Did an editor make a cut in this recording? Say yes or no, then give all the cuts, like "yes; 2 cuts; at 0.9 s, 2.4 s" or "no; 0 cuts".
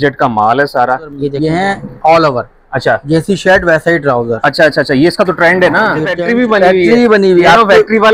yes; 2 cuts; at 1.3 s, 6.2 s